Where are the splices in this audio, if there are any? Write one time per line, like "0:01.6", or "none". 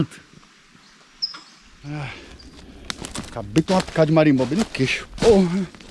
0:01.7